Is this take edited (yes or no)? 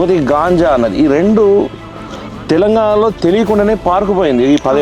no